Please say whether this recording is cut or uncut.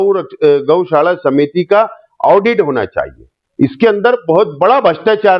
cut